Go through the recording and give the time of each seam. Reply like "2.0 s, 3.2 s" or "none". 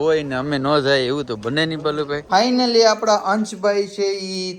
2.2 s